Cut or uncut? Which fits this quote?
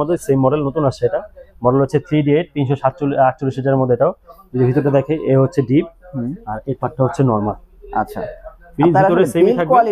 uncut